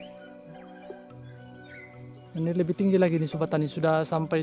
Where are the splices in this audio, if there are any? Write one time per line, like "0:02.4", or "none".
0:02.3